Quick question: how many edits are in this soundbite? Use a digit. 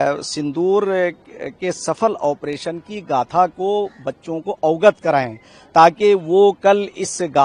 0